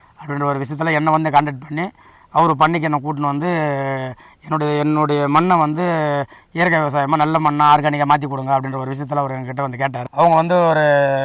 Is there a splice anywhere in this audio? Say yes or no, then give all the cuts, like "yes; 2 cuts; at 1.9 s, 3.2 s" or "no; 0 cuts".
yes; 1 cut; at 10.0 s